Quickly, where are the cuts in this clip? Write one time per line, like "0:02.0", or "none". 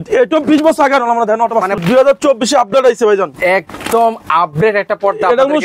0:01.8